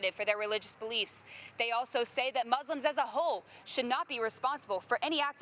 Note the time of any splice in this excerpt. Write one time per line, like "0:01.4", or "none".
none

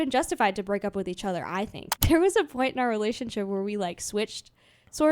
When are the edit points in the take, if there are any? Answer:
0:01.9

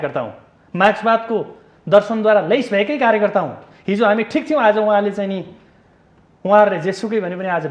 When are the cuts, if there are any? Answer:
none

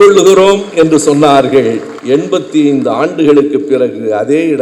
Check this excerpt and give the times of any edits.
0:01.9

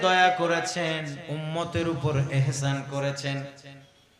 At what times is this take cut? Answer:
0:01.2

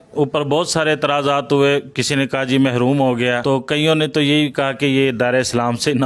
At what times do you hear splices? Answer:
0:03.4

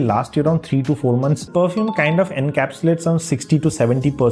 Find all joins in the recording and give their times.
0:01.5

